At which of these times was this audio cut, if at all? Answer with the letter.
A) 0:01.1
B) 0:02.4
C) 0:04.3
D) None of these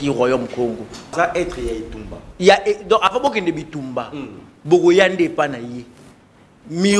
A